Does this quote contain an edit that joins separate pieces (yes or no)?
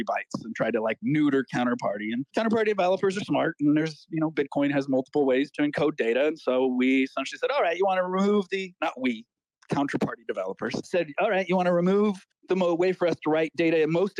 yes